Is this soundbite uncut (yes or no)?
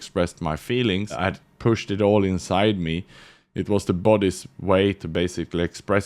no